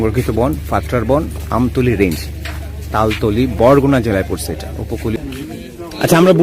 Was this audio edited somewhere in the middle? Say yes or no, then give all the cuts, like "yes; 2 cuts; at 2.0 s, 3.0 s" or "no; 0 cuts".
yes; 1 cut; at 5.2 s